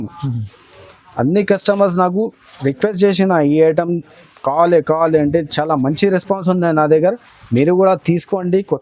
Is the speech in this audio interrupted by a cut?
no; 0 cuts

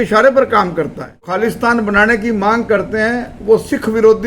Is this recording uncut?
no; 1 cut; at 1.3 s

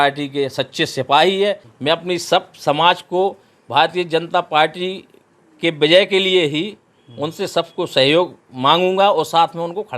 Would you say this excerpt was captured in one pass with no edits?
no; 1 cut; at 1.7 s

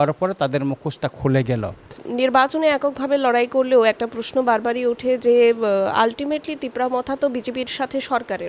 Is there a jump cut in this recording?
yes; 1 cut; at 2.0 s

